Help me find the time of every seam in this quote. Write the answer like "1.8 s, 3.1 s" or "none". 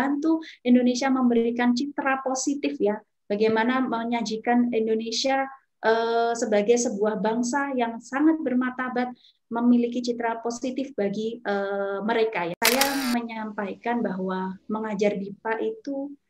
12.6 s